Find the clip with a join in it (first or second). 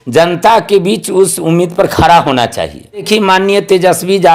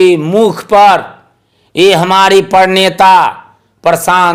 first